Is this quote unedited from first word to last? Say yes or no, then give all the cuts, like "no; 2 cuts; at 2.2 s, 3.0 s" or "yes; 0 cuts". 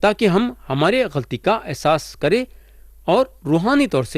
yes; 0 cuts